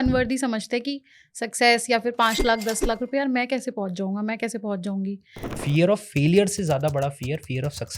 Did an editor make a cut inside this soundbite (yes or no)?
yes